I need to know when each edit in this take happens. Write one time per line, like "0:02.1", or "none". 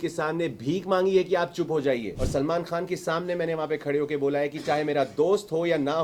0:02.1